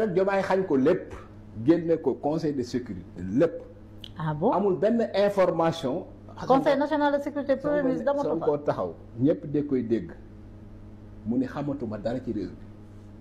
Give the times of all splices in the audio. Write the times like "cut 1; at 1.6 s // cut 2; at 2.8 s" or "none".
none